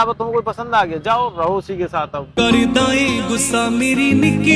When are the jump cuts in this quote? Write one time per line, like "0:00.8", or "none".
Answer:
none